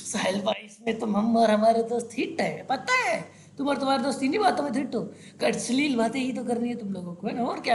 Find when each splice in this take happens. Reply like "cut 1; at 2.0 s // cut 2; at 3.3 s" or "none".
none